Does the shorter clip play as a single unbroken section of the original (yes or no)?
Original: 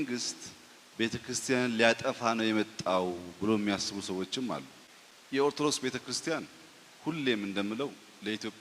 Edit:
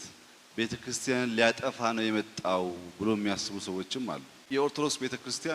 no